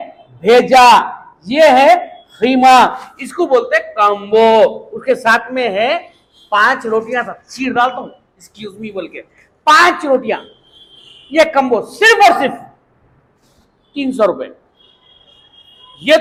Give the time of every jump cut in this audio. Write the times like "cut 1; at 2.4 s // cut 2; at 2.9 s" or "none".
none